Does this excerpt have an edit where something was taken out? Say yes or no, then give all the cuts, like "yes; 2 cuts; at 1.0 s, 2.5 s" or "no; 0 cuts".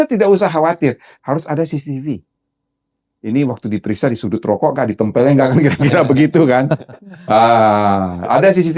yes; 1 cut; at 1.1 s